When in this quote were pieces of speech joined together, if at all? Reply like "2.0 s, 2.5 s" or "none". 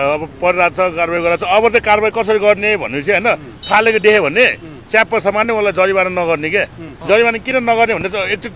6.9 s